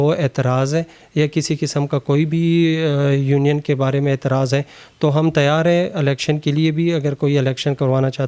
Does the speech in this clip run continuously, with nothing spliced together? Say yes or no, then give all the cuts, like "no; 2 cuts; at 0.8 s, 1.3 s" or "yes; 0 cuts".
yes; 0 cuts